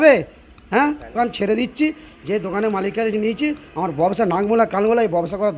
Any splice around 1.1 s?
yes; 1 cut; at 1.1 s

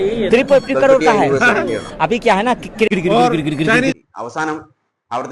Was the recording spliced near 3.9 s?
yes; 2 cuts; at 2.9 s, 3.9 s

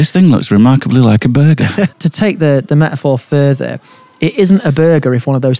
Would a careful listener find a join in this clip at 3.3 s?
no; 1 cut; at 1.9 s

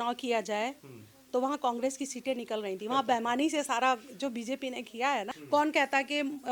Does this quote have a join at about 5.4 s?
yes; 1 cut; at 5.4 s

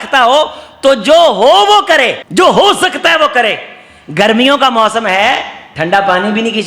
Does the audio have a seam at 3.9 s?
no; 1 cut; at 2.2 s

